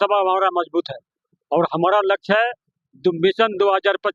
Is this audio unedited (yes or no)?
yes